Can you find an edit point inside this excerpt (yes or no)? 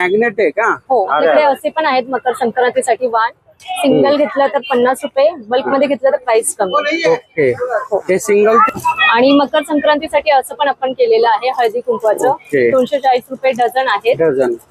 yes